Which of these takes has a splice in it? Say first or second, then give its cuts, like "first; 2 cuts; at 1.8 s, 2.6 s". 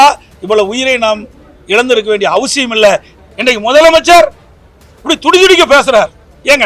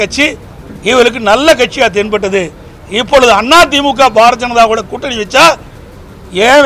first; 1 cut; at 3.2 s